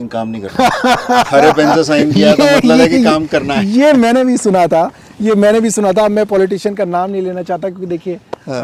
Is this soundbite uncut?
yes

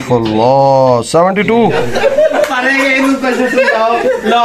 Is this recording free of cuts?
no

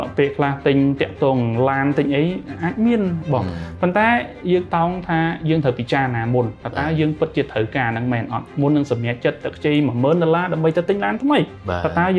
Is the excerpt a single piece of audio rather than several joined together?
yes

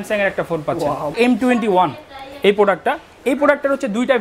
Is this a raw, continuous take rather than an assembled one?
no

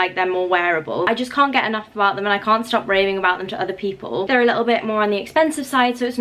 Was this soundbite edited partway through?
yes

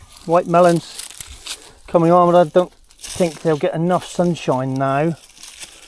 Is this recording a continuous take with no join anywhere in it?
yes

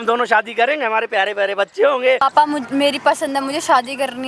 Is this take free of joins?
no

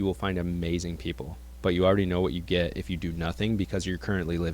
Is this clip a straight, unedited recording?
no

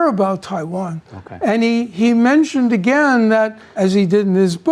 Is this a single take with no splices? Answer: no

